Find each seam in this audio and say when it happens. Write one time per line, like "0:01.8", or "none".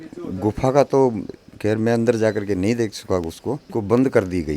0:03.6